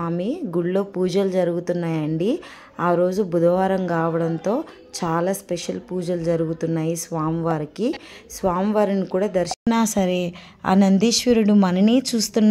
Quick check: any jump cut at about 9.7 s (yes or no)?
yes